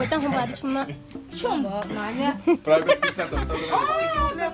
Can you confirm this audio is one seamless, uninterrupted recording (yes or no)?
yes